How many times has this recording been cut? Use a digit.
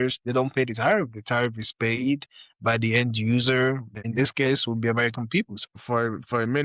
2